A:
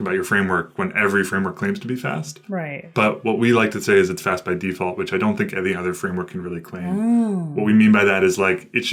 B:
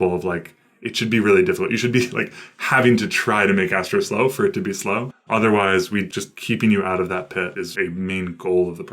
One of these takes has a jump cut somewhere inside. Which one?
B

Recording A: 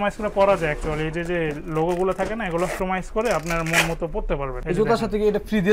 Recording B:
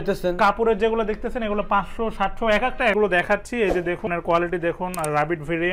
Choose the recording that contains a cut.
B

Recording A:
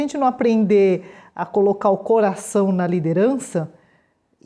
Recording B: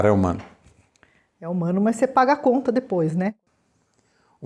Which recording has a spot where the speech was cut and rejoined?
B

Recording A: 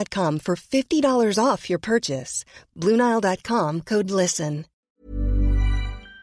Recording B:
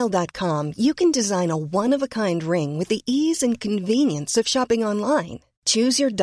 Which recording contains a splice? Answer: A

